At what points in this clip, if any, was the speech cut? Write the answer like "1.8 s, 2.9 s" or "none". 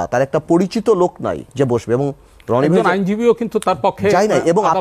1.4 s